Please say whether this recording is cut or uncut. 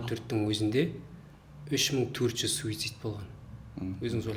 uncut